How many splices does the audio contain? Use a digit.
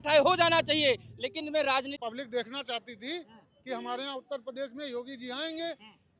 1